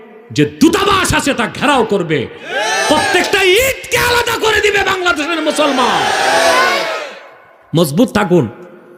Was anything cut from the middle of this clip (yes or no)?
no